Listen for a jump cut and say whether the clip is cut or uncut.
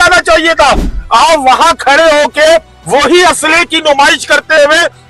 uncut